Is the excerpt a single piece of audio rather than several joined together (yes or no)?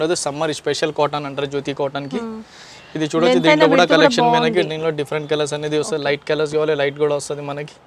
yes